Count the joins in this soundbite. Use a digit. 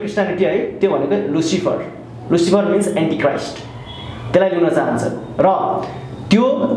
0